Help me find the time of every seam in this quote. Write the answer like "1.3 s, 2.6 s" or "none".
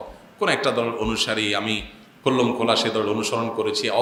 none

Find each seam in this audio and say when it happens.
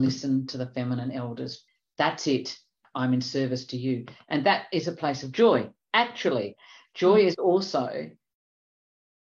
1.6 s, 2.8 s

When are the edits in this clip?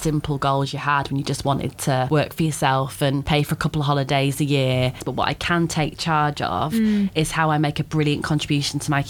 2.1 s, 3.2 s, 5.0 s

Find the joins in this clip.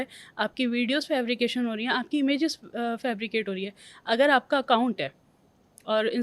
none

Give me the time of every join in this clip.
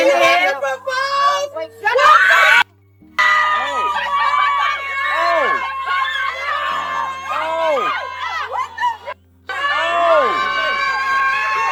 none

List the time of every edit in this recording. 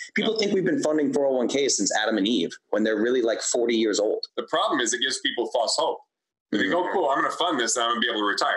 4.3 s

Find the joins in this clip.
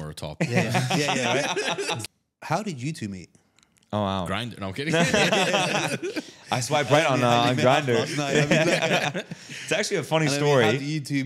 2.0 s

